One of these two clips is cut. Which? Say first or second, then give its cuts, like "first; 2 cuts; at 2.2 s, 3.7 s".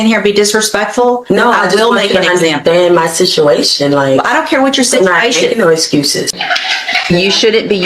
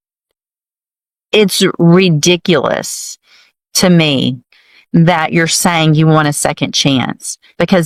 first; 1 cut; at 6.4 s